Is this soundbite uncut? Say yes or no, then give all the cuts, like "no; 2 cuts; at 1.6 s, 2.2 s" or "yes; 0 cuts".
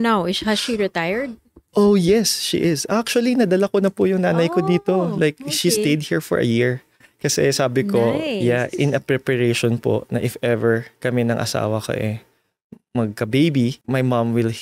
yes; 0 cuts